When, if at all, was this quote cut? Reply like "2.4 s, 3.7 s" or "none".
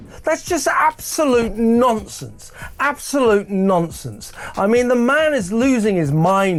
none